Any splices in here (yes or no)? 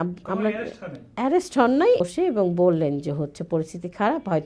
yes